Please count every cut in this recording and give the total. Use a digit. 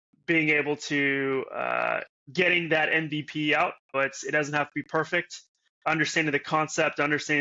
2